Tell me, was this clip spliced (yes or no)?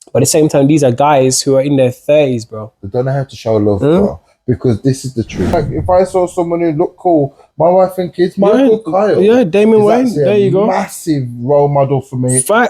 yes